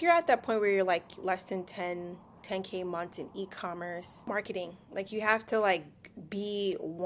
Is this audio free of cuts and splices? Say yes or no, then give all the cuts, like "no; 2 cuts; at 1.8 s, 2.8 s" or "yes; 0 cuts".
yes; 0 cuts